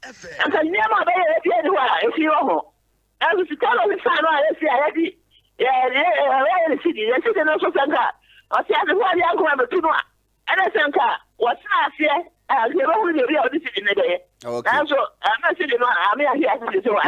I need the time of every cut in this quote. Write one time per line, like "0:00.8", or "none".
none

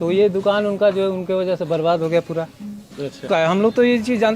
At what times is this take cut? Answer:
0:03.2

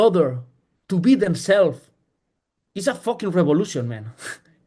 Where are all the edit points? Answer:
none

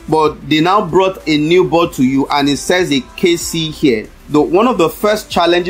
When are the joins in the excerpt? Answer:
none

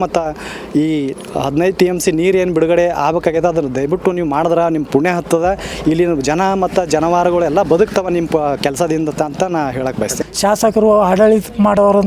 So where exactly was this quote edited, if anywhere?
0:10.2

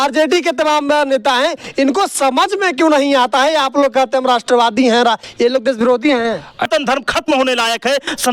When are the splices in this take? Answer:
0:06.7

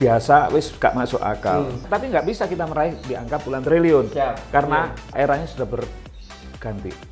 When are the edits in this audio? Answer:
0:01.8
0:05.1

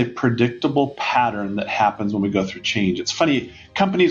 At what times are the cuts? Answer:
none

